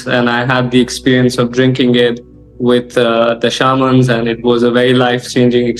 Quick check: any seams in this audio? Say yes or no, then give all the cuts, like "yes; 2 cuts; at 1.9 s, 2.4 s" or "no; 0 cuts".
no; 0 cuts